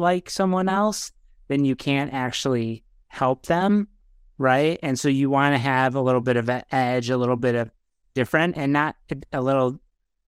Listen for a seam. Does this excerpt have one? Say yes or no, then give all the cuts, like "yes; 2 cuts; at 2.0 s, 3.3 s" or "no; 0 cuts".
no; 0 cuts